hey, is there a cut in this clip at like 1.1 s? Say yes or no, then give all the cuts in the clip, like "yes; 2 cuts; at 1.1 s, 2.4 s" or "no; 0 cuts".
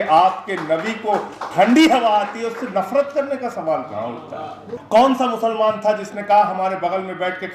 no; 1 cut; at 4.7 s